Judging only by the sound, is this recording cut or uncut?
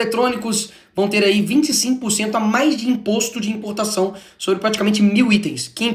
uncut